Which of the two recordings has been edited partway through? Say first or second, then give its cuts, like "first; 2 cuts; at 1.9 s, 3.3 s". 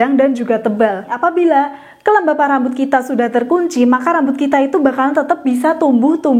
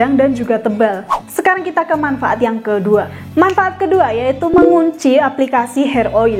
first; 1 cut; at 1.1 s